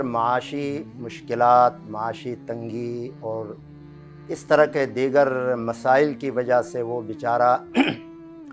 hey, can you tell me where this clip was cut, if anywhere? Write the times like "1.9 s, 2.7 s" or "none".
none